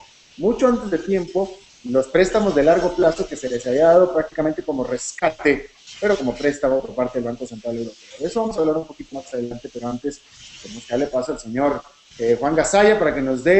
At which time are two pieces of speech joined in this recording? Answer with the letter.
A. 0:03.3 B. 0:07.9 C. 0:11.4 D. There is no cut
A